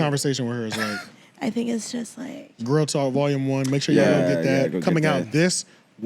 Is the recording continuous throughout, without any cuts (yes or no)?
no